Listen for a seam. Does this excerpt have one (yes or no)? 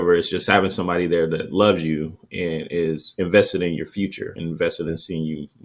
no